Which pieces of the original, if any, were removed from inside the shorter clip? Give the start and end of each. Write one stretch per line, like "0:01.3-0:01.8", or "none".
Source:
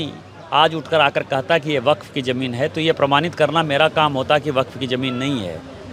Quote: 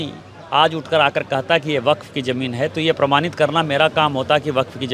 none